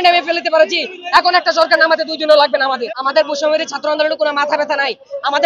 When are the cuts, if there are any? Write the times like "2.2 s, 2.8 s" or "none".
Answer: 2.8 s